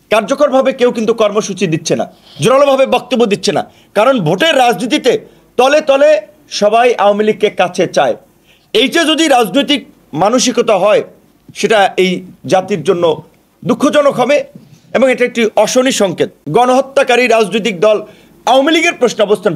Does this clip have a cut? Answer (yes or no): yes